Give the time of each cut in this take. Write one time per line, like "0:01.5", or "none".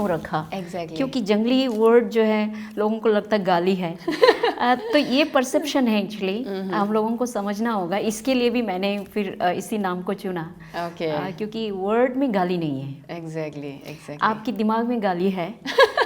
none